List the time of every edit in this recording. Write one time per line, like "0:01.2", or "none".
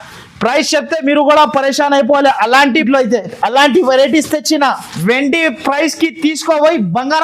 0:02.8